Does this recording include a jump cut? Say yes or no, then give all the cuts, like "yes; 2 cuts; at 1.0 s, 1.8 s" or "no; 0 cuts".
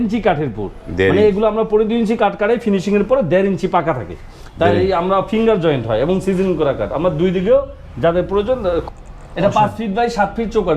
yes; 1 cut; at 8.8 s